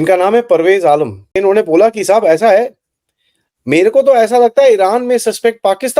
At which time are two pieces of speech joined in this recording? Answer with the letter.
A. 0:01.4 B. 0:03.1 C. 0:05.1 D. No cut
A